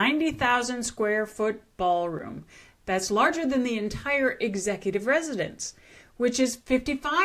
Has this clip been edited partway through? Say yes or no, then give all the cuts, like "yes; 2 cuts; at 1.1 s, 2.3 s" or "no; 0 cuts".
no; 0 cuts